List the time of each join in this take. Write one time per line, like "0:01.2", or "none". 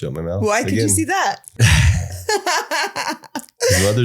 0:01.5